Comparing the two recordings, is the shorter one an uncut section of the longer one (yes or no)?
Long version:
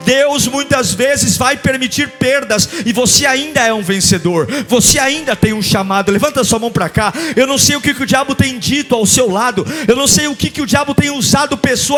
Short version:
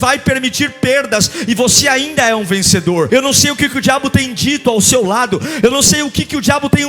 no